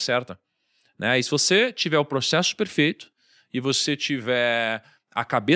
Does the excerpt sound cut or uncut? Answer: uncut